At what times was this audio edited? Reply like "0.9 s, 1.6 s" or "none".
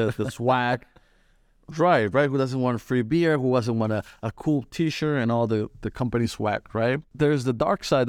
7.1 s